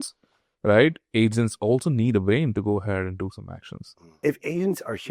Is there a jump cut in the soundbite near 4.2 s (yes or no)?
yes